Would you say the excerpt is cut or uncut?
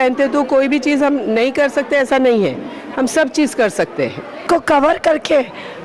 cut